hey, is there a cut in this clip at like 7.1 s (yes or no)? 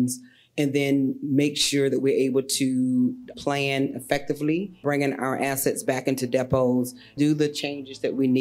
yes